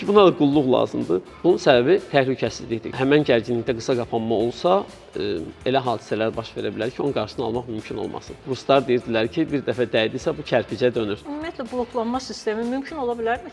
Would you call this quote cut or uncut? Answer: cut